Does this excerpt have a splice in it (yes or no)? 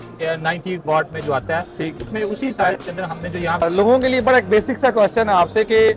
yes